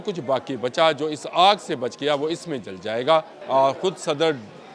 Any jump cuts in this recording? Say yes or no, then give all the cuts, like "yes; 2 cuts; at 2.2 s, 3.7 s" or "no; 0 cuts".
yes; 1 cut; at 3.4 s